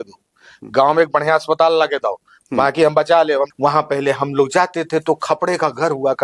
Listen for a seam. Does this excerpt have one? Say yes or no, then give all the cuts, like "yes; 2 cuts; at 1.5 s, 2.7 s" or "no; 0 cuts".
yes; 1 cut; at 3.5 s